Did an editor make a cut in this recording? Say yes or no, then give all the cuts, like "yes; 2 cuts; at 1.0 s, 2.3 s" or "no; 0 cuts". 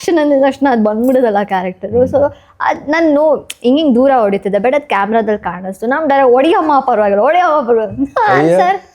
no; 0 cuts